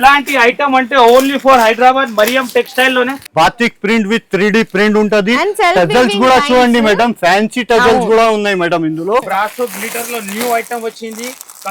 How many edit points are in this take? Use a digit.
2